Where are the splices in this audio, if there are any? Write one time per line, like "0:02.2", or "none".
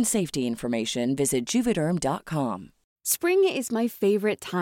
0:02.9